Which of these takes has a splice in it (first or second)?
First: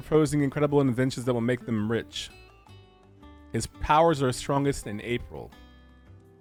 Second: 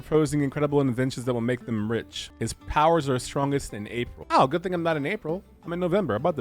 second